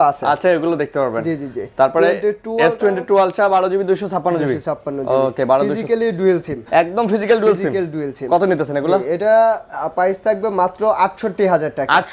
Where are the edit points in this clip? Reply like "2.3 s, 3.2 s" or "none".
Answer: none